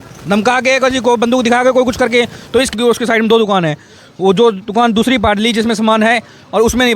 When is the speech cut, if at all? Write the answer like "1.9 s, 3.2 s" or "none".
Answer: 2.8 s